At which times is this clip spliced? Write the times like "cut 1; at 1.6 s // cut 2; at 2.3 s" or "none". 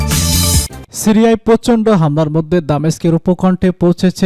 none